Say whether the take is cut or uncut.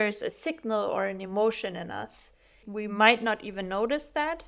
cut